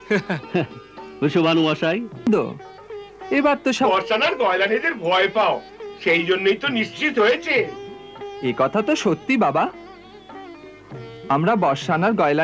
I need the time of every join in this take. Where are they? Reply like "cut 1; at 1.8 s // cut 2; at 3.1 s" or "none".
cut 1; at 2.2 s